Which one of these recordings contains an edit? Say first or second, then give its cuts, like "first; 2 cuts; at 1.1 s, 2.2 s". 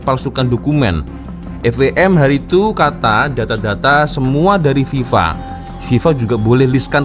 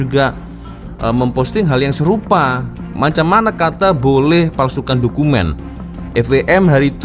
second; 1 cut; at 2.9 s